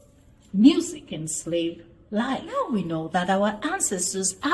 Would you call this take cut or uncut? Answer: uncut